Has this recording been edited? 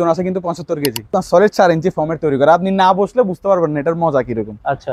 yes; 1 cut; at 1.1 s

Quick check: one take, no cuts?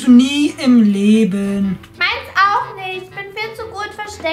yes; 0 cuts

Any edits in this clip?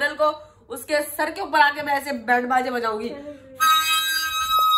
no; 0 cuts

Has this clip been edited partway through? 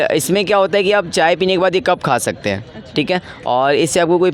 no; 0 cuts

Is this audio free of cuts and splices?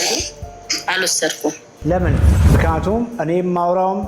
no; 1 cut; at 2.3 s

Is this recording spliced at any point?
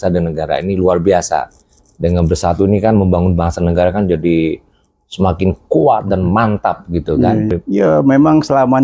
yes; 1 cut; at 7.5 s

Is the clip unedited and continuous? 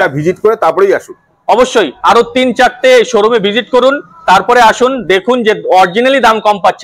yes; 0 cuts

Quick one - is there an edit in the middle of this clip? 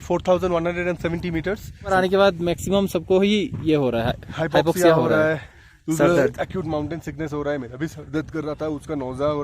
yes; 1 cut; at 1.9 s

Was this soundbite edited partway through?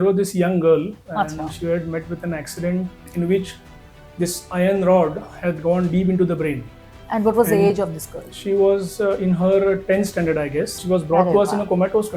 yes; 2 cuts; at 3.0 s, 10.8 s

